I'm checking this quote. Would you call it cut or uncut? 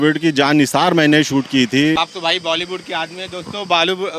cut